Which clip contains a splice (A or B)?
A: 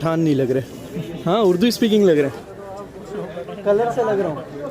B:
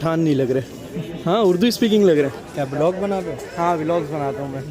A